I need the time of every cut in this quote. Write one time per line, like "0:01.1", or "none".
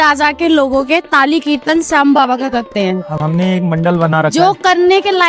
none